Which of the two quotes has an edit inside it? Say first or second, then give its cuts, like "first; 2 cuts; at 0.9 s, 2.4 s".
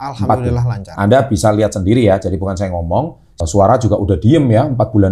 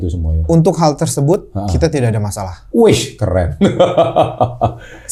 first; 1 cut; at 3.4 s